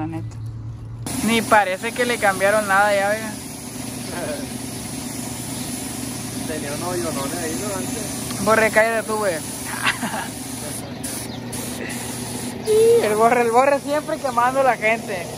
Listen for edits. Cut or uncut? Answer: cut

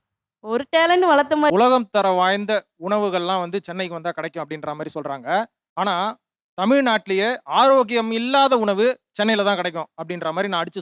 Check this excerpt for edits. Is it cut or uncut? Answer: cut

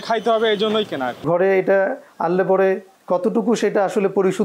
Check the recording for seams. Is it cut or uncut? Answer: cut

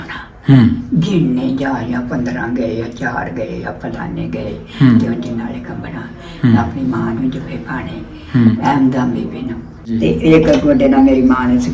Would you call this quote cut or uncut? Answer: cut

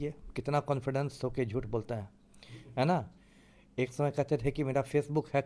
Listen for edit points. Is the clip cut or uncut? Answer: uncut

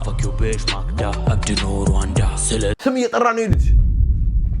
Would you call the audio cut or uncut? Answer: cut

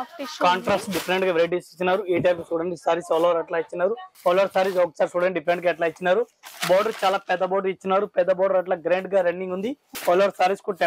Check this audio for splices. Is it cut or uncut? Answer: cut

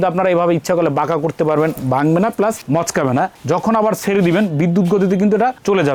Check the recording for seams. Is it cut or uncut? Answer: uncut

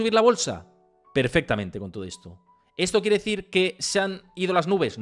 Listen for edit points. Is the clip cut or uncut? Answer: uncut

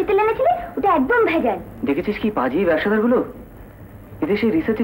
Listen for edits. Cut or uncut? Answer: cut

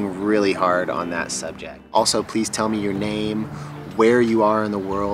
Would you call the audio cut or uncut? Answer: cut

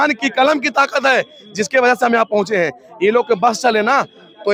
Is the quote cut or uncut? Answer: uncut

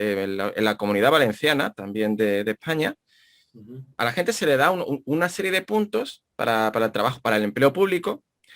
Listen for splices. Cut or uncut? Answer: cut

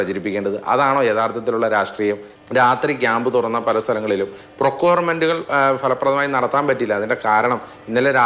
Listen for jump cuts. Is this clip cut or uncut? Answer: cut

